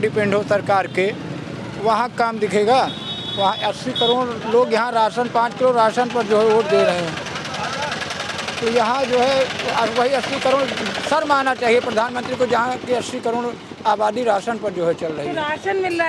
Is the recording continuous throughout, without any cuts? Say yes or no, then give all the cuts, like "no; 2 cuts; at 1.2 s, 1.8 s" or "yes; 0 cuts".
yes; 0 cuts